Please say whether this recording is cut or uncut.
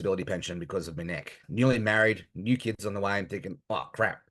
cut